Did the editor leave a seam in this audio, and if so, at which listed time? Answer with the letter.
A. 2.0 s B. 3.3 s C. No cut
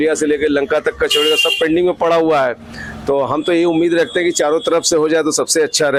C